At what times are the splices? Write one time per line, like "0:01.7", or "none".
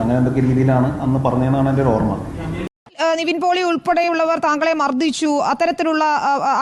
0:02.8

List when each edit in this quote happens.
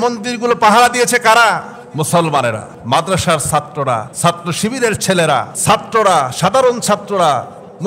0:01.8
0:02.7
0:04.1
0:05.5

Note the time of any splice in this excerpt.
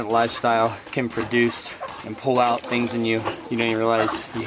0:00.8
0:01.8
0:03.4

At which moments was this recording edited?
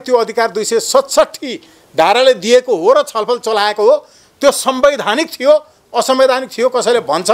none

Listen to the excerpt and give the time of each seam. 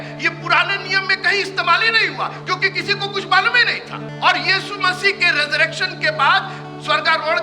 0:04.1

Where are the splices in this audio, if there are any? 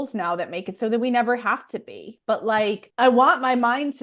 0:02.9

